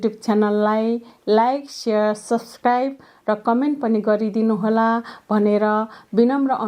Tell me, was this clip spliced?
no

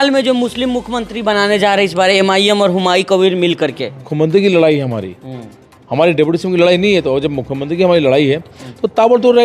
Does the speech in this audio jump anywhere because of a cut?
yes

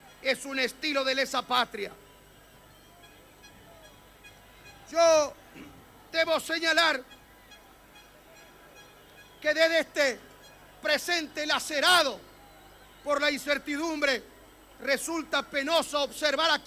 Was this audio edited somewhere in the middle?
no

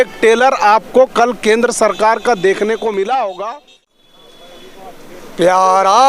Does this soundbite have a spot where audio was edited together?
yes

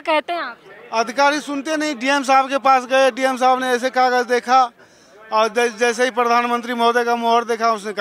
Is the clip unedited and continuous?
yes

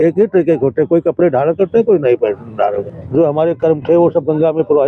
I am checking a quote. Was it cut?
yes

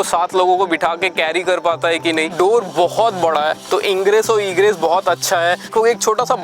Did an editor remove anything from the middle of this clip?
yes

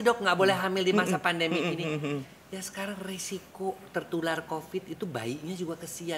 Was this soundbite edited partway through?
no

